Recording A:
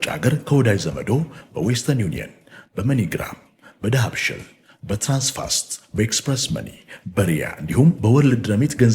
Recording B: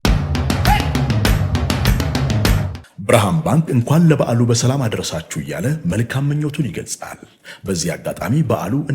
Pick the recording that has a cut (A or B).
B